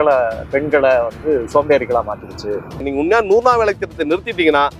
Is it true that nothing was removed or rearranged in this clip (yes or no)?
no